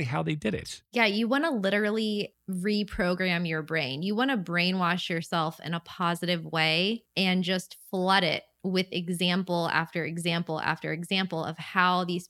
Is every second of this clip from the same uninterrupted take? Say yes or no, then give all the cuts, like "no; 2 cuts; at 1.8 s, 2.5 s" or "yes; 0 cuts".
no; 2 cuts; at 2.4 s, 7.1 s